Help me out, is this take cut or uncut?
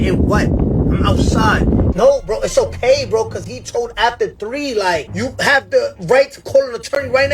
cut